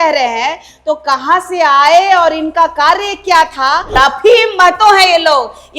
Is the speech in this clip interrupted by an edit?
yes; 1 cut; at 3.9 s

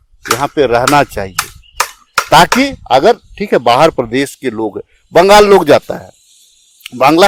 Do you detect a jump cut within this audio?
no; 0 cuts

